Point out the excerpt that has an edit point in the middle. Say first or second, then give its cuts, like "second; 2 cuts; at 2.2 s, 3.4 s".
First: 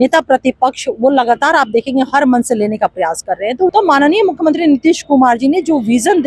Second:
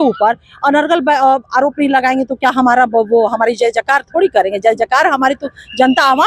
first; 1 cut; at 3.7 s